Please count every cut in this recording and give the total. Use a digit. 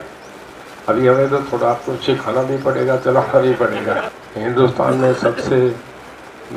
1